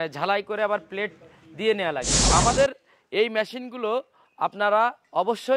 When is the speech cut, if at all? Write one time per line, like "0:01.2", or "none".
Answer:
0:02.2